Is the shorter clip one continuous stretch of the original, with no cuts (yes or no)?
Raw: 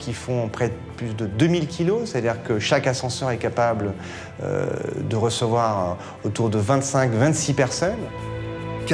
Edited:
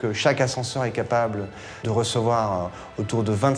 no